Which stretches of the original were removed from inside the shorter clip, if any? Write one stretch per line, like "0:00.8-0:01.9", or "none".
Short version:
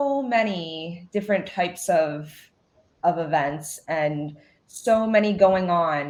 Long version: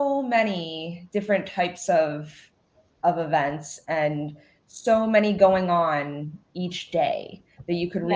none